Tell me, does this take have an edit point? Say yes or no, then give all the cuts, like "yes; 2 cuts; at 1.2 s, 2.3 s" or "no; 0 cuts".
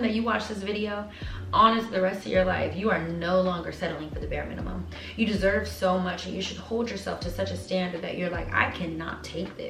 no; 0 cuts